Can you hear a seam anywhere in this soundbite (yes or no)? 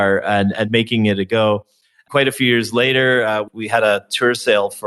yes